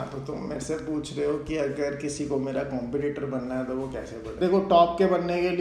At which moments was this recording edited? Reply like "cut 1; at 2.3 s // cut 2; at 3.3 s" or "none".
cut 1; at 4.2 s